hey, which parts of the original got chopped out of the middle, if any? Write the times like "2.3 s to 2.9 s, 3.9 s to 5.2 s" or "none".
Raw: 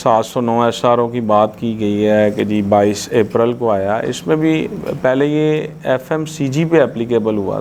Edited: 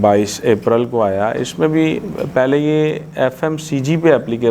none